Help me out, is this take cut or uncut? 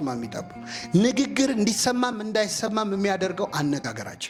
uncut